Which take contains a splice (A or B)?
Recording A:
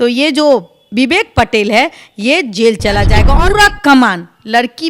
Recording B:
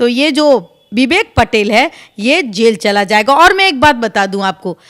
A